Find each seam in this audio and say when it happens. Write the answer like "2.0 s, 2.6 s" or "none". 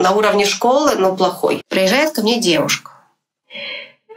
1.6 s